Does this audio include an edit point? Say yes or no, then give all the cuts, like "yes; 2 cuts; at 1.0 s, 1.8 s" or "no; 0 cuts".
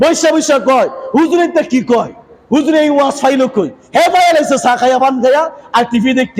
no; 0 cuts